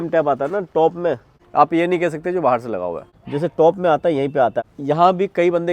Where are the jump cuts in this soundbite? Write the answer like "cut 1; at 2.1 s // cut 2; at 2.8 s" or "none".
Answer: cut 1; at 1.3 s // cut 2; at 3.1 s // cut 3; at 4.7 s